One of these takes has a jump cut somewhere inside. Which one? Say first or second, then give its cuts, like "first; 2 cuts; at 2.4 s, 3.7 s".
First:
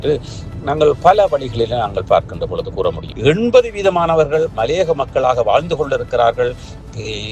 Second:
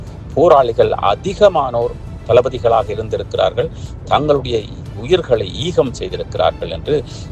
first; 1 cut; at 3.1 s